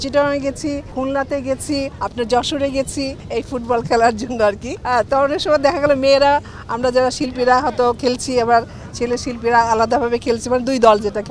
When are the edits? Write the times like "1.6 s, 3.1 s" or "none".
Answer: 0.9 s, 2.0 s, 3.2 s, 4.7 s